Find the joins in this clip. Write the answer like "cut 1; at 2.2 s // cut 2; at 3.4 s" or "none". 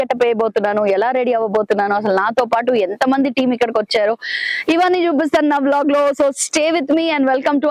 none